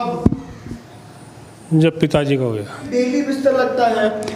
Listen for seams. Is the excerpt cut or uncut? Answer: cut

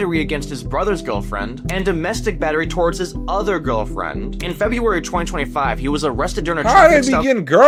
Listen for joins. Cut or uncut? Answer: uncut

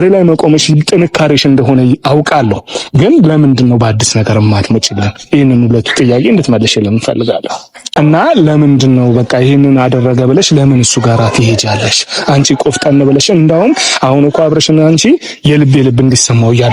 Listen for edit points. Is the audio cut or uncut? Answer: cut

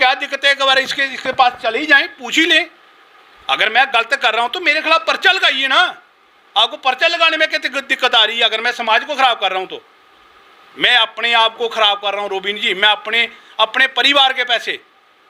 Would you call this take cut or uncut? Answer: uncut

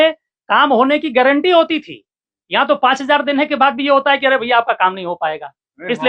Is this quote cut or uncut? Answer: uncut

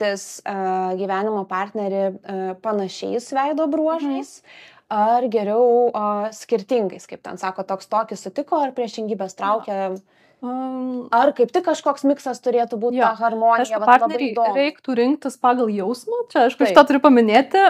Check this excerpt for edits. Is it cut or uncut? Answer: uncut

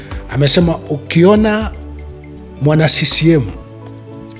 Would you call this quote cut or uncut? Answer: uncut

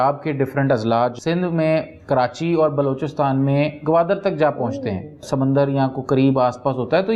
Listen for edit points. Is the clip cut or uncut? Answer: cut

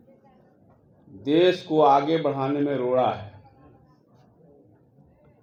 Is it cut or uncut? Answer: uncut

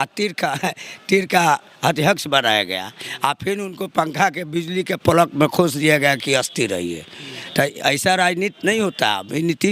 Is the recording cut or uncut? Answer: uncut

